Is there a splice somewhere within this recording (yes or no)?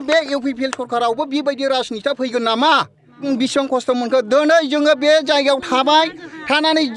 yes